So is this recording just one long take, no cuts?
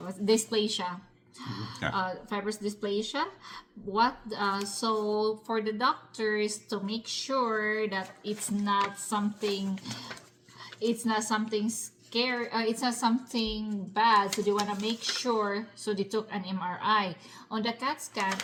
yes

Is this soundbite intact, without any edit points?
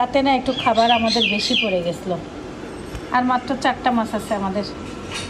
yes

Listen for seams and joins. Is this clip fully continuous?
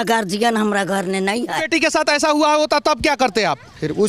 no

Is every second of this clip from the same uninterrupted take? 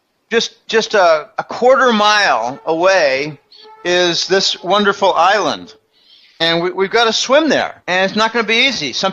no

